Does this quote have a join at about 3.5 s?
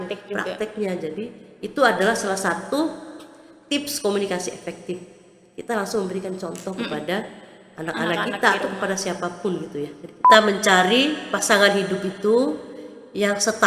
no; 1 cut; at 10.1 s

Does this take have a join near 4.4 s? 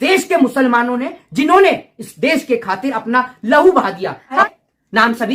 no; 0 cuts

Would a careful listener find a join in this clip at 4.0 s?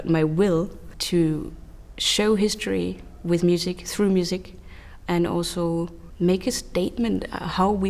no; 2 cuts; at 0.9 s, 6.0 s

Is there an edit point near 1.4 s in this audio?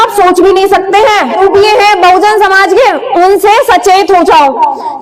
yes; 1 cut; at 1.4 s

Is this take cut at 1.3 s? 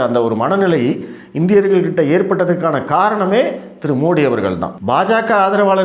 no; 1 cut; at 4.7 s

